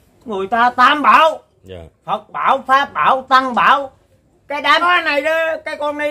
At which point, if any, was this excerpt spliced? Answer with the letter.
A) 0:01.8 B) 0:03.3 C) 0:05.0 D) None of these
C